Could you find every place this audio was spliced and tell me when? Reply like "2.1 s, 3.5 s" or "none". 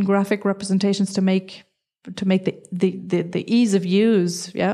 none